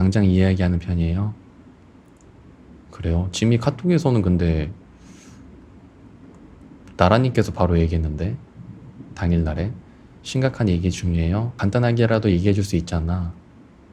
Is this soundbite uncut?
yes; 0 cuts

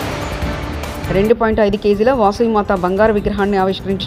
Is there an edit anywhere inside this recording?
yes; 1 cut; at 1.0 s

